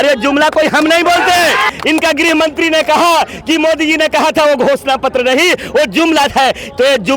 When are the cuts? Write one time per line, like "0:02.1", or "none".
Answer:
0:01.7